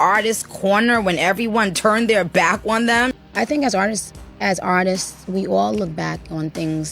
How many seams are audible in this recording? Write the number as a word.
one